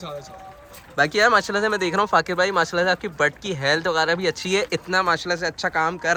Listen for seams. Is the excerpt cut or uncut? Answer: uncut